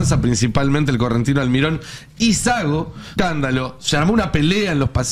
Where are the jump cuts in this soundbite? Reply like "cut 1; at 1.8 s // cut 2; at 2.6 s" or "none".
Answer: cut 1; at 3.0 s